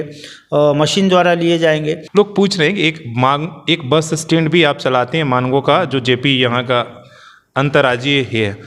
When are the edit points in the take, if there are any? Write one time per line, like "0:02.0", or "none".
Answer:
0:02.0